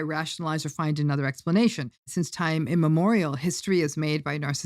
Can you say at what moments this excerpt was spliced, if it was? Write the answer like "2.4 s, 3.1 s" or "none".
2.1 s